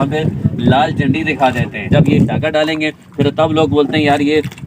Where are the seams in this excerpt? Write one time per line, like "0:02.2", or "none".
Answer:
0:01.9